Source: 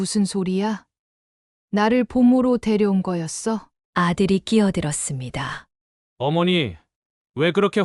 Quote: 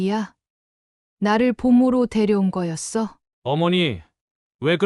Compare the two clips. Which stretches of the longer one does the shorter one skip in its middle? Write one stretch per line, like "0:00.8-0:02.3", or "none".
0:03.8-0:06.0